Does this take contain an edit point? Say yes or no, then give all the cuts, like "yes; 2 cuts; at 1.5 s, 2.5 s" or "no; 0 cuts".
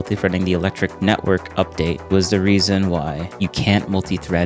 yes; 3 cuts; at 0.9 s, 2.0 s, 3.2 s